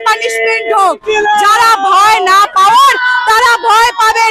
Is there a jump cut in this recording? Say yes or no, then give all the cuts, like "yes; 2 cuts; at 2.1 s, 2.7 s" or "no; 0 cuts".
no; 0 cuts